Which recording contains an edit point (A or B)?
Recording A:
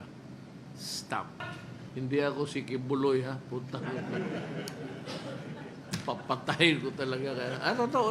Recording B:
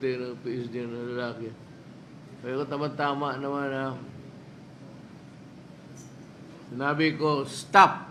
A